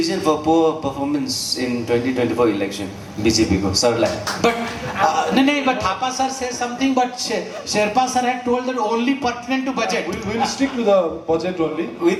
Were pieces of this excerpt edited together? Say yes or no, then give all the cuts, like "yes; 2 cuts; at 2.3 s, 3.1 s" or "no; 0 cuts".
no; 0 cuts